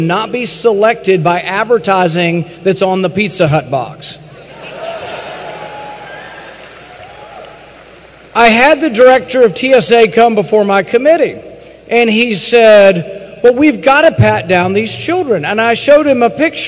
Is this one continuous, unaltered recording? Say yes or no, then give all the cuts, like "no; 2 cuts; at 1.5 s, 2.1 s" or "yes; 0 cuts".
no; 1 cut; at 10.9 s